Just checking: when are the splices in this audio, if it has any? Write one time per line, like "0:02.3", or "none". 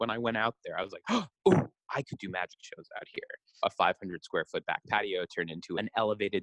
0:03.6